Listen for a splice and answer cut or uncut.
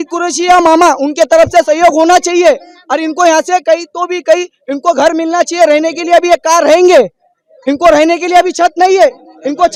uncut